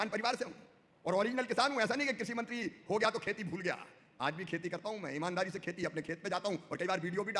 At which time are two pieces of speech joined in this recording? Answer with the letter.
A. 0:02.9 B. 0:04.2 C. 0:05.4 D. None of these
D